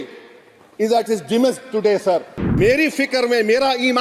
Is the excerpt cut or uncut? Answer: cut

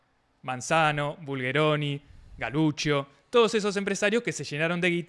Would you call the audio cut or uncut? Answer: uncut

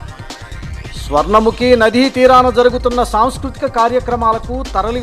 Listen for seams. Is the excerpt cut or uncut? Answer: cut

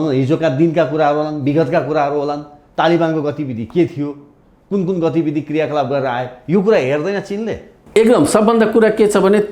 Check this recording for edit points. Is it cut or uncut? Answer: uncut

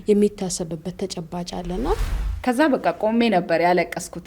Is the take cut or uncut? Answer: cut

